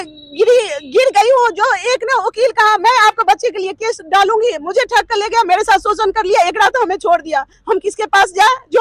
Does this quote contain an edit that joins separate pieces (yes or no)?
no